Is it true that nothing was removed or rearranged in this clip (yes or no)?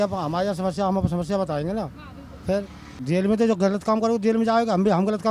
no